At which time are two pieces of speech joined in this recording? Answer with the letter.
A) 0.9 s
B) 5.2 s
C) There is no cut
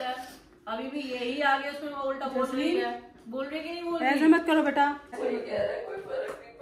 B